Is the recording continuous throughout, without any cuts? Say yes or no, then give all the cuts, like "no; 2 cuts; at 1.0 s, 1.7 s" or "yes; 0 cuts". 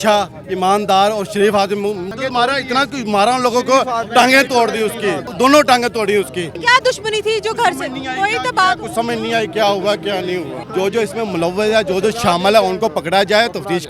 no; 4 cuts; at 2.1 s, 5.3 s, 6.6 s, 10.6 s